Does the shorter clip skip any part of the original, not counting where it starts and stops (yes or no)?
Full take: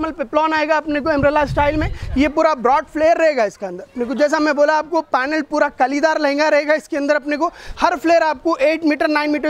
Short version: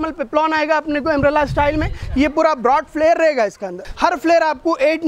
yes